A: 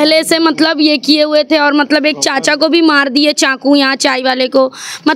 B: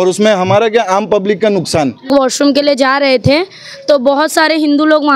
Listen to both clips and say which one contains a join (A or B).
B